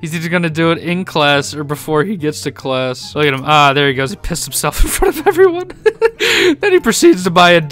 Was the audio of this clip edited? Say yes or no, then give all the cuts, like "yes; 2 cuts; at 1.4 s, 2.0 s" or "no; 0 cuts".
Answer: yes; 1 cut; at 3.0 s